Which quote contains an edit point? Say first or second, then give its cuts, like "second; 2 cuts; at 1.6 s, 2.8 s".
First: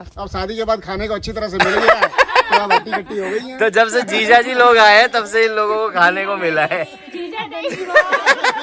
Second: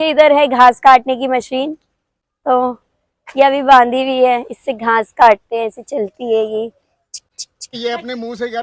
second; 1 cut; at 7.7 s